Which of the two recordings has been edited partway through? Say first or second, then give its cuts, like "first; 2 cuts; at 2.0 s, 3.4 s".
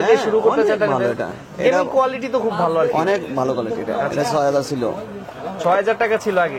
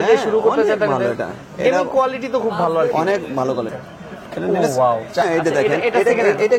second; 2 cuts; at 3.7 s, 5.2 s